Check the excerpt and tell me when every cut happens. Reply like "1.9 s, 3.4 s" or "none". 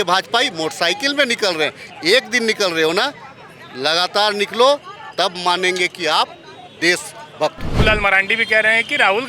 7.8 s